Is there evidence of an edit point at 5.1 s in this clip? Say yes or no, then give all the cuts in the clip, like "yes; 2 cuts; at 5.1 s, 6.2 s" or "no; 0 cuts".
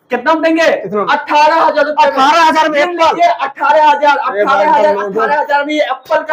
no; 0 cuts